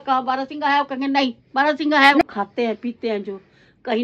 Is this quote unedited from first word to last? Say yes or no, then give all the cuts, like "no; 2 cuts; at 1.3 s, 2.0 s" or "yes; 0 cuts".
no; 1 cut; at 2.2 s